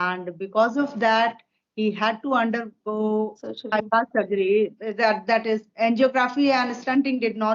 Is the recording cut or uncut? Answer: cut